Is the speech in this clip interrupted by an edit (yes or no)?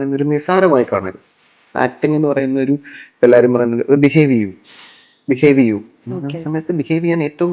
yes